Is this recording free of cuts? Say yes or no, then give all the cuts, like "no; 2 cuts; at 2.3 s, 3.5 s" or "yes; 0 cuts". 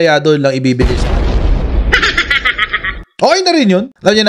yes; 0 cuts